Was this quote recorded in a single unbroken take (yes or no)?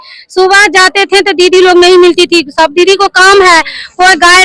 yes